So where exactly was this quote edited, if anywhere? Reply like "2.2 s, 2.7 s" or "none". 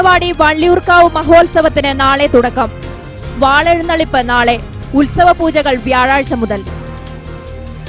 none